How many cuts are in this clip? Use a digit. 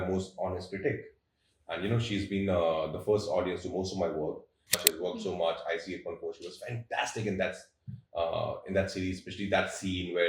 1